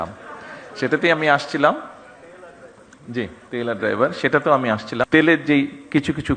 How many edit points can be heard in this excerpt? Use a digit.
1